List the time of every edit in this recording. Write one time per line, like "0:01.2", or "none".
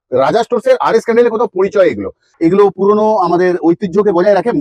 0:02.2